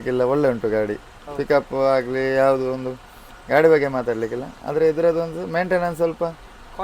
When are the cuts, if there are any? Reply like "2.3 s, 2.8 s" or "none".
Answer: none